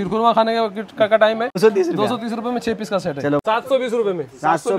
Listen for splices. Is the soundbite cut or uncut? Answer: cut